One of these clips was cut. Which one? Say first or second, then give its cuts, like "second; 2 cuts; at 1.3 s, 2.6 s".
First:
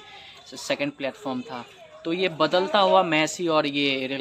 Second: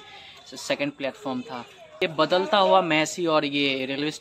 second; 1 cut; at 2.0 s